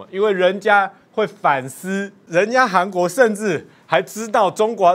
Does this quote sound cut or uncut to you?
cut